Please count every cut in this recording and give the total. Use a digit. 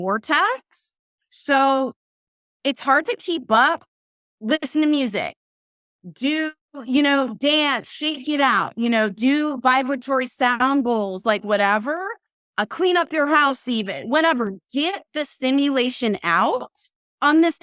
0